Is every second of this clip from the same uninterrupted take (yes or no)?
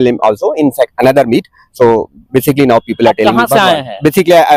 yes